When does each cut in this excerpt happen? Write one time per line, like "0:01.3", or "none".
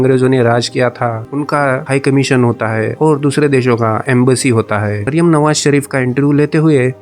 0:05.0